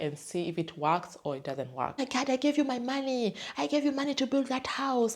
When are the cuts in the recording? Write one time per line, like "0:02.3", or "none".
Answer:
0:02.1